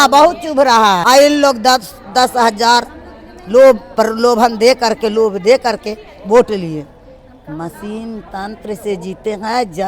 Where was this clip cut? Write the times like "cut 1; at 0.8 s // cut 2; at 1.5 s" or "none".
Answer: cut 1; at 1.0 s